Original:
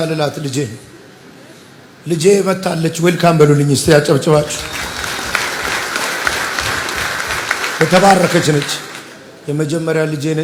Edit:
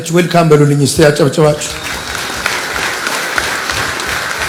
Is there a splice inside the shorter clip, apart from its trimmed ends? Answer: no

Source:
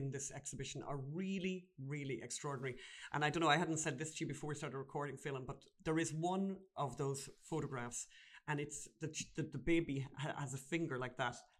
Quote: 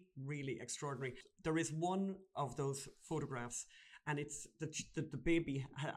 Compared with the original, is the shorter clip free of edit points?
no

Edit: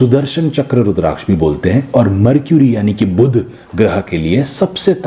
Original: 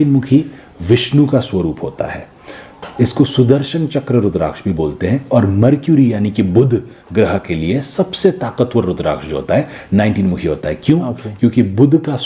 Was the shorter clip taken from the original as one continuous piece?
yes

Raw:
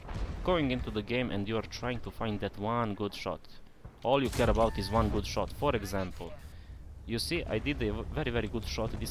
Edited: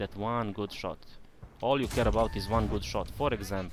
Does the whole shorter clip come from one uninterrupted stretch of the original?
yes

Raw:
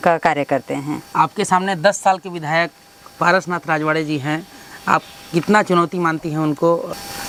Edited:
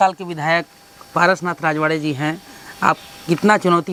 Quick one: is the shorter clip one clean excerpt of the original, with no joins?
yes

